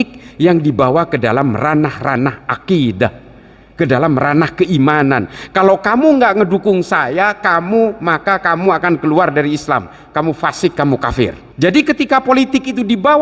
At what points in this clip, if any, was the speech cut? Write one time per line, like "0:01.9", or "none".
0:11.4